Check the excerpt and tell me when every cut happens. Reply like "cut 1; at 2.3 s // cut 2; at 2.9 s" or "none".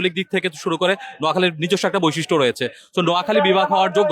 none